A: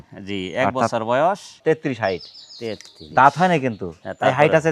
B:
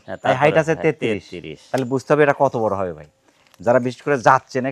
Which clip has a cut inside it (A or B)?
A